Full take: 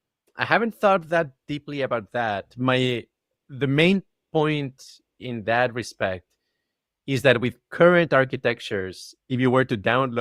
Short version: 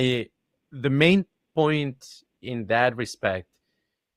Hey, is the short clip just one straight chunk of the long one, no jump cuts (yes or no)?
yes